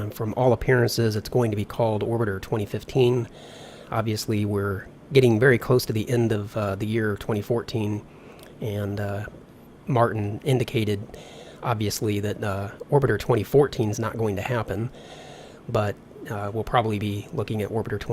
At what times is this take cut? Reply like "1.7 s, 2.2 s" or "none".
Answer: 11.5 s